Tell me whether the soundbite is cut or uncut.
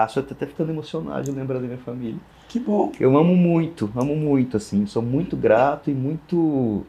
uncut